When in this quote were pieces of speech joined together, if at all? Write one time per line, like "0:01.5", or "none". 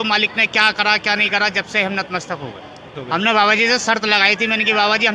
0:03.0